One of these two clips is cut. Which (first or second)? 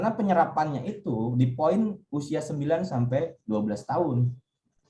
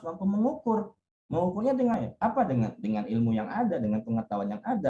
second